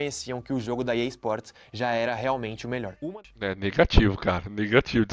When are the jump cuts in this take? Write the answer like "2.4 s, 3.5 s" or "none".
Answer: 3.0 s